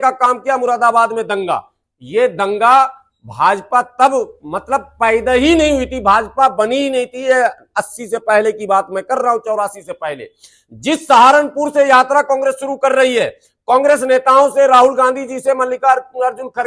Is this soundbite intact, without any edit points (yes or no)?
yes